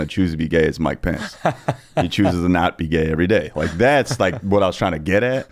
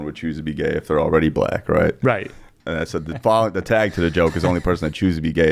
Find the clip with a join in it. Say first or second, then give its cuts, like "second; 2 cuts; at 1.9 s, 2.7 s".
second; 1 cut; at 2.5 s